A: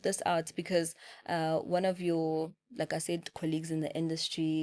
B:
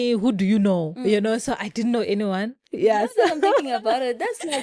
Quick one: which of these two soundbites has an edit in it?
B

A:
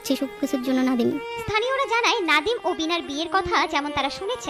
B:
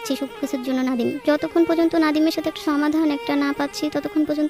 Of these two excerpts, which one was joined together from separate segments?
B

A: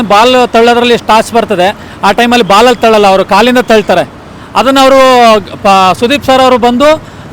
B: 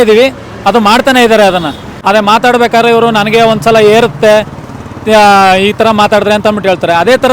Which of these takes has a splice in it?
B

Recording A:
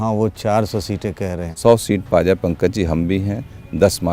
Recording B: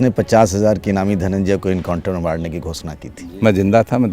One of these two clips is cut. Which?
B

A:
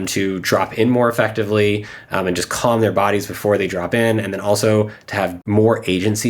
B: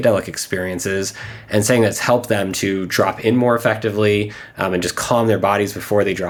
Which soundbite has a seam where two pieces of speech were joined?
A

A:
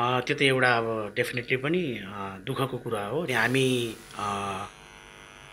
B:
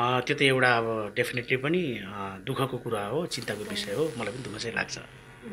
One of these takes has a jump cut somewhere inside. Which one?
A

